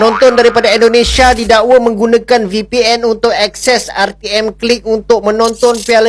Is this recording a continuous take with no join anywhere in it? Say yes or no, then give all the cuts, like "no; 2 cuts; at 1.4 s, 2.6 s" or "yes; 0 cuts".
yes; 0 cuts